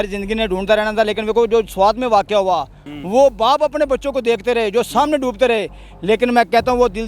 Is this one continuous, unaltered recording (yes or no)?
no